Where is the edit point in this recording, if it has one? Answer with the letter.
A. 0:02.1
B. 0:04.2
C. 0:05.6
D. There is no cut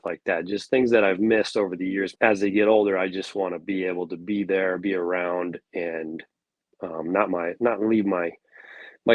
A